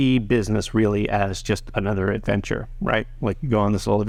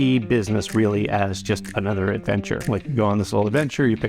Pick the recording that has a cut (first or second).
second